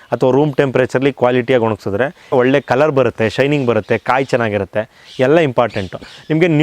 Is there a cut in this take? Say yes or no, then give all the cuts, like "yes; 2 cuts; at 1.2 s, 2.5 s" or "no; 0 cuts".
yes; 1 cut; at 2.3 s